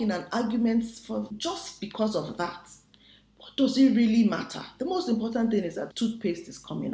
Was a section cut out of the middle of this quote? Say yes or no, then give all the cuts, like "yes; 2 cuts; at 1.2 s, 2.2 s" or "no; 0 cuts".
yes; 2 cuts; at 1.3 s, 5.9 s